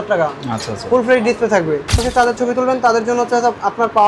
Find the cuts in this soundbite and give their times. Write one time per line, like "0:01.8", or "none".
0:02.0